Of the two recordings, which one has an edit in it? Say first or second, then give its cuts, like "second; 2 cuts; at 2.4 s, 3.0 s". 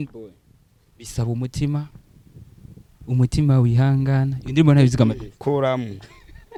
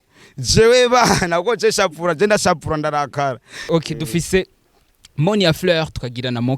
second; 1 cut; at 3.6 s